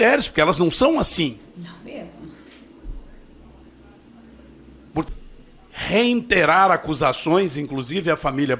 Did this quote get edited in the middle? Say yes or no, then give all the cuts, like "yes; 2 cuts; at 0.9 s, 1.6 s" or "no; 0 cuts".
yes; 1 cut; at 5.1 s